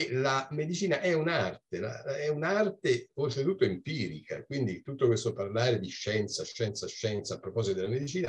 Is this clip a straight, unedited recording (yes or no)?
yes